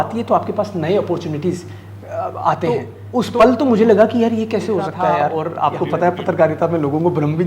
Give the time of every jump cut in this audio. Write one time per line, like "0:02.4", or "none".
0:02.9
0:05.3

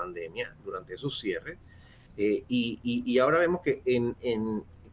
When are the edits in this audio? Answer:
none

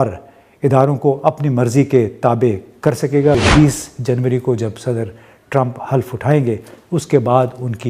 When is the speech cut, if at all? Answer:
0:03.4

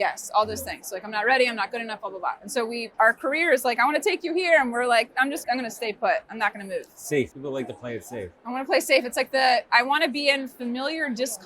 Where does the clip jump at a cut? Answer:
0:02.9
0:05.4
0:07.4

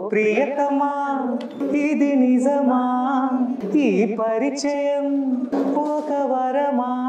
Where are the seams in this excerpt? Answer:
0:01.6
0:03.6
0:05.5

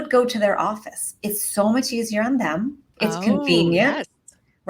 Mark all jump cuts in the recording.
0:02.8

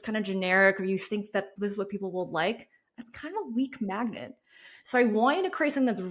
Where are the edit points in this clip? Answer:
0:01.5

